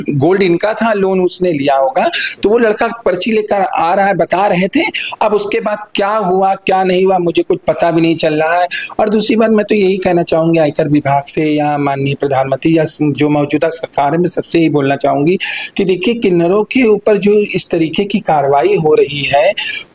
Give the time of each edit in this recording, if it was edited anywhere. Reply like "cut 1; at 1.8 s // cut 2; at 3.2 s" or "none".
none